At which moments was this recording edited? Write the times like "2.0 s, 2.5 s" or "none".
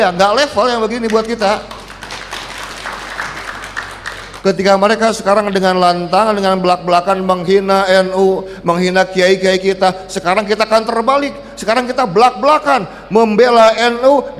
4.2 s